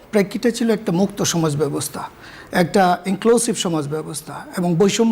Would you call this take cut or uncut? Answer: uncut